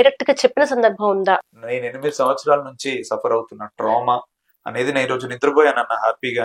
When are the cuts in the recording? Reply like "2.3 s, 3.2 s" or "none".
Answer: 1.5 s